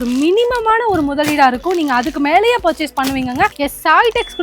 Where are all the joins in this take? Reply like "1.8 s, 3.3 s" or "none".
3.5 s